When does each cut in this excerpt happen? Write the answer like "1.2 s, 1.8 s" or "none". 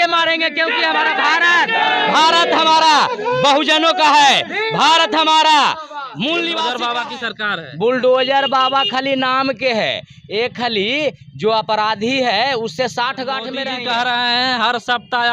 6.8 s, 13.6 s